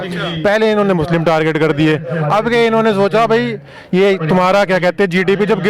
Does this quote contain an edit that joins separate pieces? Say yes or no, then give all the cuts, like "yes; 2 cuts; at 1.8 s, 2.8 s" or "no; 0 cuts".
no; 0 cuts